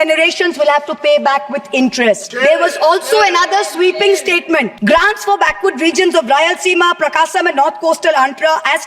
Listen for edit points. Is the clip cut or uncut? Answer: cut